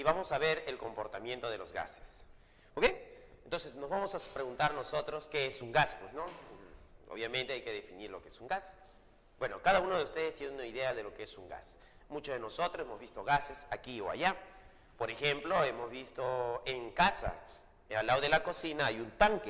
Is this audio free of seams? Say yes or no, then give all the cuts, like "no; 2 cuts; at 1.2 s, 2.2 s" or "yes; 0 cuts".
yes; 0 cuts